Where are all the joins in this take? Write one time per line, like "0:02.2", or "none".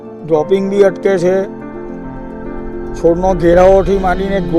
none